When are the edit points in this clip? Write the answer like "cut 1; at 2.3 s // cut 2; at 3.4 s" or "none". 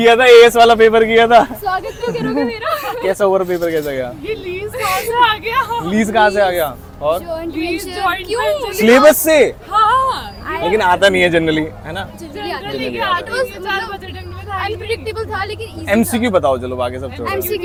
none

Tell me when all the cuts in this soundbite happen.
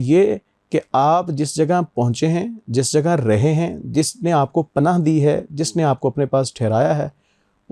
none

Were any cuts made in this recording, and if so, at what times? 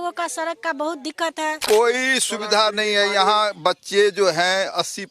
cut 1; at 1.6 s

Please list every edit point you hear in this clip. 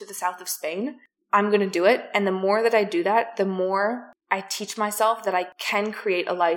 cut 1; at 4.1 s // cut 2; at 5.6 s

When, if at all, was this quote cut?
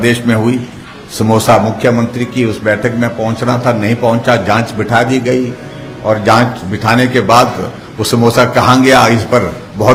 none

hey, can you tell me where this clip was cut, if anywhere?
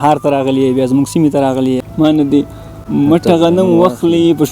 cut 1; at 1.9 s

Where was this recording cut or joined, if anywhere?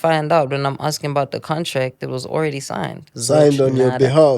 cut 1; at 3.1 s

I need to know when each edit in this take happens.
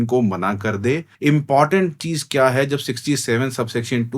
cut 1; at 1.1 s

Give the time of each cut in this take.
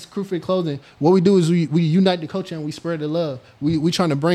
none

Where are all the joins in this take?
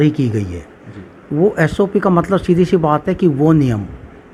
none

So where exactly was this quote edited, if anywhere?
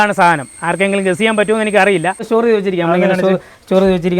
cut 1; at 2.2 s

